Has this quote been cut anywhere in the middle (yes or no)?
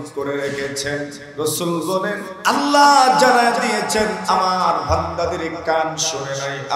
yes